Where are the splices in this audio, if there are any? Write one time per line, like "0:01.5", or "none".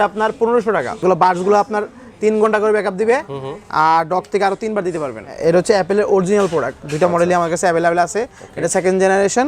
0:01.0
0:05.3